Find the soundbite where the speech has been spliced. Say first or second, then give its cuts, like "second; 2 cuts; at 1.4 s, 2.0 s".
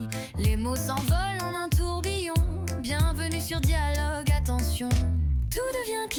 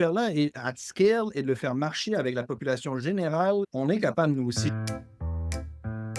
second; 1 cut; at 4.7 s